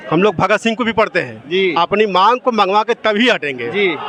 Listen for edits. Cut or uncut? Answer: uncut